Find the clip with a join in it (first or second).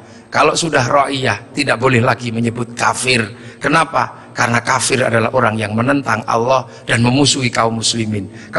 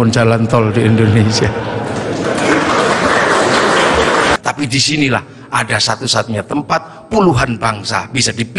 second